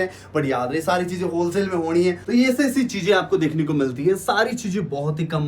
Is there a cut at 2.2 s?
yes; 1 cut; at 2.2 s

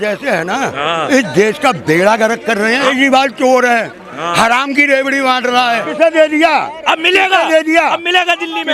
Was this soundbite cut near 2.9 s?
yes; 2 cuts; at 2.9 s, 5.9 s

